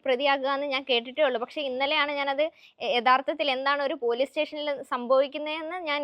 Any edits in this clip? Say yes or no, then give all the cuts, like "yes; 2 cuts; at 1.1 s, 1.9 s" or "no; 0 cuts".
no; 0 cuts